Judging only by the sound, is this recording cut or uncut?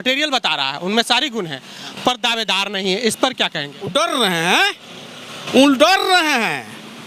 uncut